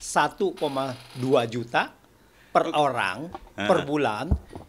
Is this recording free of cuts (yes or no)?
yes